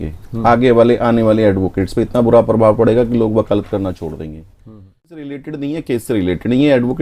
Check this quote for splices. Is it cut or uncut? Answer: cut